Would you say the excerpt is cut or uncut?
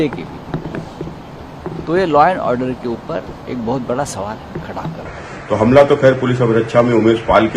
cut